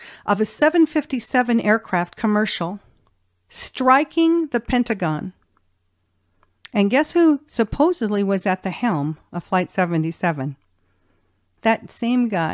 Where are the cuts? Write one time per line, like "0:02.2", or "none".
0:11.6